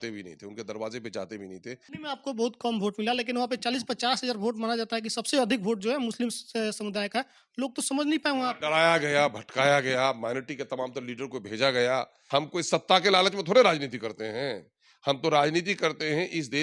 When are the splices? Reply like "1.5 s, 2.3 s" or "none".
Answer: 1.9 s, 12.2 s